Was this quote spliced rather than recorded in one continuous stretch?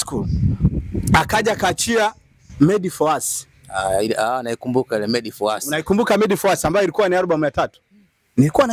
no; 0 cuts

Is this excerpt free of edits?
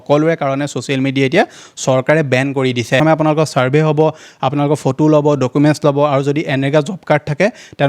no; 1 cut; at 3.0 s

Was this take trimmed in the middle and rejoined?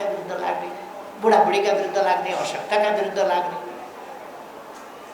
no; 0 cuts

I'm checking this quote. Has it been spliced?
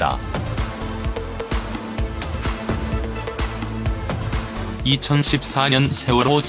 no; 0 cuts

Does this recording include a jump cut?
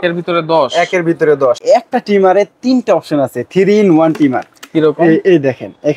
yes; 1 cut; at 1.6 s

